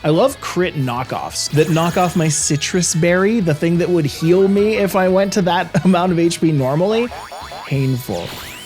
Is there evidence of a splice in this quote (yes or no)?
yes